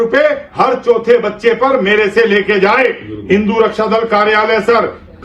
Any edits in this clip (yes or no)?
no